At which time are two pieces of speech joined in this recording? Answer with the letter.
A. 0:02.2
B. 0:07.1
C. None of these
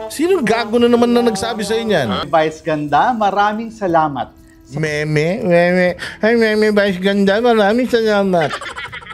A